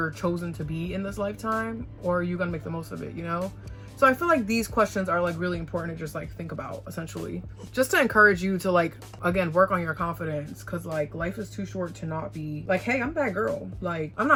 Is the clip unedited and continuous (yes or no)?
yes